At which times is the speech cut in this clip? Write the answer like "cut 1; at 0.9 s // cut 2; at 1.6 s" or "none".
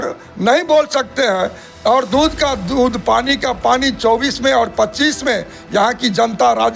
none